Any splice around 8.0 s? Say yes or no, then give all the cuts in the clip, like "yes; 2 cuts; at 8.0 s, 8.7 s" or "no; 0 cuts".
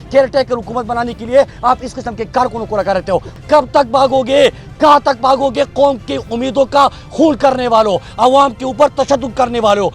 no; 1 cut; at 3.3 s